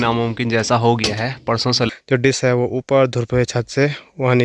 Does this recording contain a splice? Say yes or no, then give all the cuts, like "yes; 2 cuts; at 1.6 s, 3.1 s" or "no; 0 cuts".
yes; 1 cut; at 1.9 s